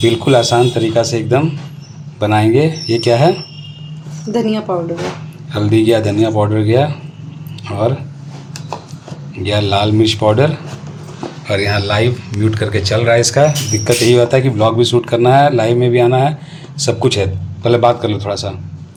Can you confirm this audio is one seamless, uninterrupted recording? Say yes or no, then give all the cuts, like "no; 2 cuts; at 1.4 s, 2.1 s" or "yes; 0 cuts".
yes; 0 cuts